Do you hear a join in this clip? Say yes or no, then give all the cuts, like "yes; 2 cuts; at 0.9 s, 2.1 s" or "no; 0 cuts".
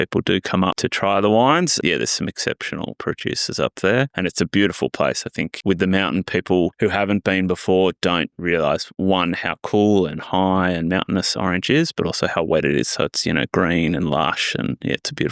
yes; 6 cuts; at 0.8 s, 1.8 s, 3.0 s, 4.1 s, 5.5 s, 6.7 s